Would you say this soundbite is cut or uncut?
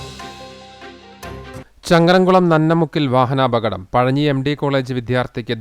cut